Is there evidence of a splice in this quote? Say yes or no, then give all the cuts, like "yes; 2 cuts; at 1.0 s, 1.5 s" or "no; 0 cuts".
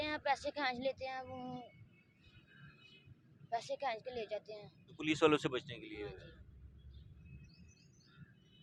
no; 0 cuts